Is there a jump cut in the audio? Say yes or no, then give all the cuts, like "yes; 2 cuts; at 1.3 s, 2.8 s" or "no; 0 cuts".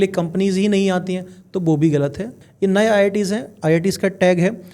yes; 1 cut; at 2.4 s